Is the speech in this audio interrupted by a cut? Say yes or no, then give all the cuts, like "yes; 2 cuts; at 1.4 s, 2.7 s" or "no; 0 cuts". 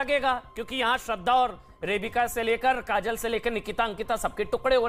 no; 0 cuts